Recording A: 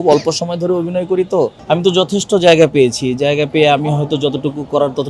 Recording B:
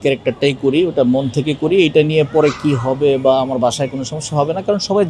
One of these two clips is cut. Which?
A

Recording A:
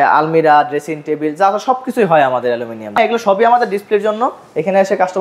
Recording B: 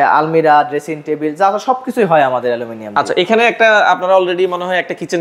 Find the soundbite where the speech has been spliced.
A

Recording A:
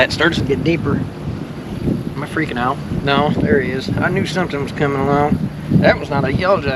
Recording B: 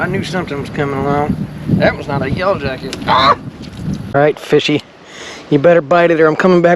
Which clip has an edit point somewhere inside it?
B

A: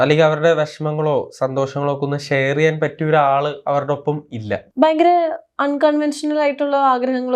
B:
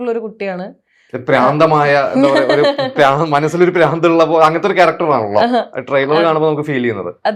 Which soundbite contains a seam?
A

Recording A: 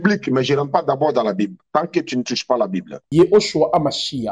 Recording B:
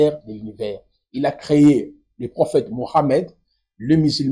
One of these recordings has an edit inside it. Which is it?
A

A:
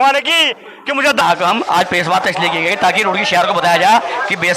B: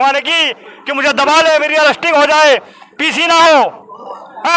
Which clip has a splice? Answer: A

